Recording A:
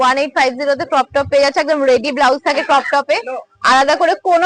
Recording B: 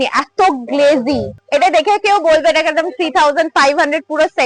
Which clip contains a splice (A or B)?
B